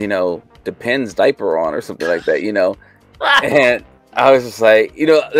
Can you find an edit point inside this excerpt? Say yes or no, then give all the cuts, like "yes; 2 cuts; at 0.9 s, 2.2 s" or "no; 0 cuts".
no; 0 cuts